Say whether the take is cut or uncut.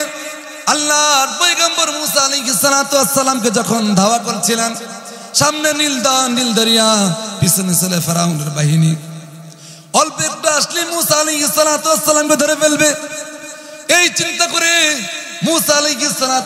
uncut